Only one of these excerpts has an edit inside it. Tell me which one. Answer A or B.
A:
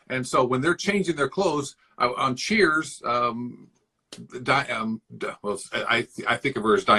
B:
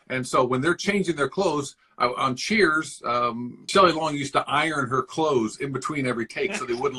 B